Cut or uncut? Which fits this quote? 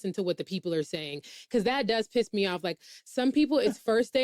uncut